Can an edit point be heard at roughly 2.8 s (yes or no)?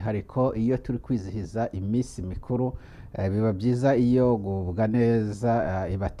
no